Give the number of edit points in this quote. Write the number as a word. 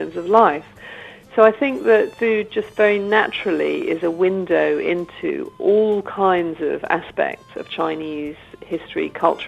zero